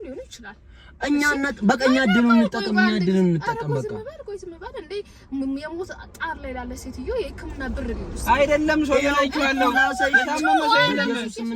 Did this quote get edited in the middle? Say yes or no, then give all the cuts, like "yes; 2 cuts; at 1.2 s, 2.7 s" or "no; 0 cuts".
no; 0 cuts